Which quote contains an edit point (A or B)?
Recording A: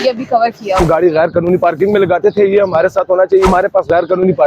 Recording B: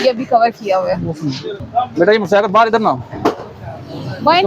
A